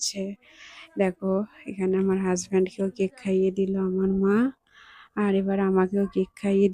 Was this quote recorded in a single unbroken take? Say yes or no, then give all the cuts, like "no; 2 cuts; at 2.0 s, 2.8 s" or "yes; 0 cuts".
yes; 0 cuts